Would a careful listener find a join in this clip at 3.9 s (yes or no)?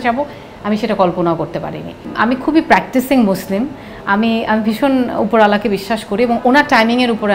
no